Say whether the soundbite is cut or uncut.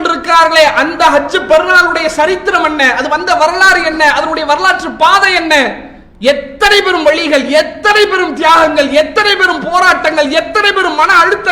uncut